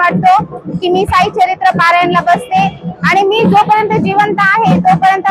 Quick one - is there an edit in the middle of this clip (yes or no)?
no